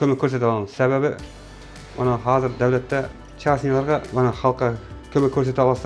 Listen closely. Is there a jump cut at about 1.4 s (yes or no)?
no